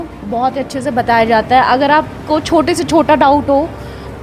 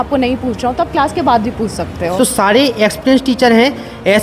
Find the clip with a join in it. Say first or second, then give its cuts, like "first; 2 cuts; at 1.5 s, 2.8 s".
second; 1 cut; at 2.1 s